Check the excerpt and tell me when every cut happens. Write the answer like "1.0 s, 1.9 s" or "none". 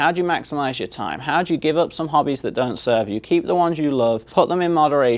4.2 s